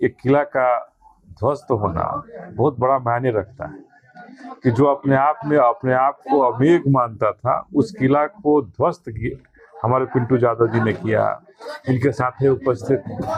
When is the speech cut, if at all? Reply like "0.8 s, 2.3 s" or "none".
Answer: none